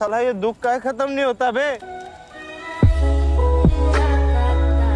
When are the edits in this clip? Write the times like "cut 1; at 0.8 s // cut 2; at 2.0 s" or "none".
none